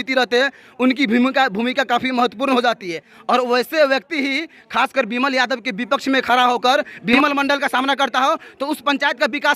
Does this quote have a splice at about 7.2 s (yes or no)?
yes